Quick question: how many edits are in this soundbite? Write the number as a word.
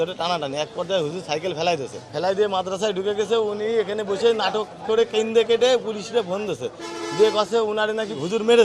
zero